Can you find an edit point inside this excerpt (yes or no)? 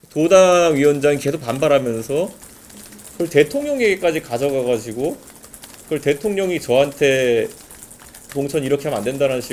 no